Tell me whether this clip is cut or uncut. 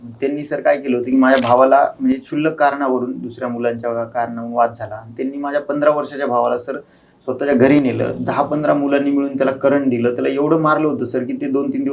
uncut